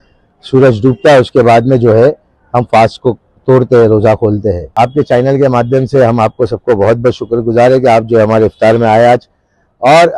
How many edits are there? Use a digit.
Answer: 1